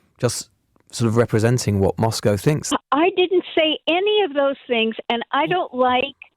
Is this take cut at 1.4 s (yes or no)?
no